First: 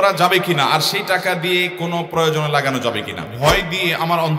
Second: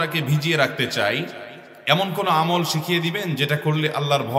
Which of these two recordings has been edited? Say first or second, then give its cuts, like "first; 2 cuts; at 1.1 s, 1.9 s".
first; 1 cut; at 3.3 s